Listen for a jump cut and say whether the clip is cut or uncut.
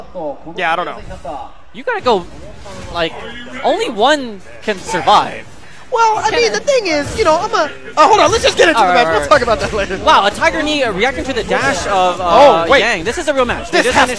uncut